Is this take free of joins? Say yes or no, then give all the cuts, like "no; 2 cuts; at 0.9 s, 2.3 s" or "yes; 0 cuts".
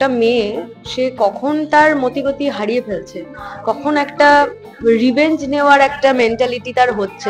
yes; 0 cuts